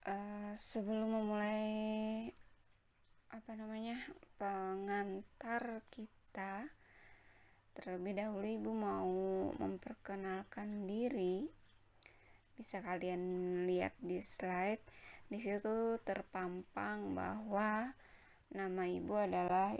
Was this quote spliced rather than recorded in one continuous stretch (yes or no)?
no